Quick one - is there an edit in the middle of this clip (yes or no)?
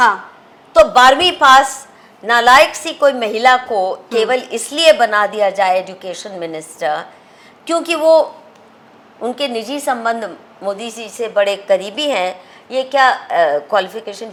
no